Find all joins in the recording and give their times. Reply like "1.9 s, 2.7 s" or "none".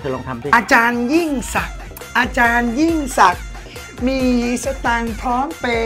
none